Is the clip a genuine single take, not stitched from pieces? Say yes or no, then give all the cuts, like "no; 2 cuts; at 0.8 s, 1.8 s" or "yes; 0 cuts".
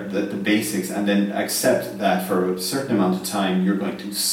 yes; 0 cuts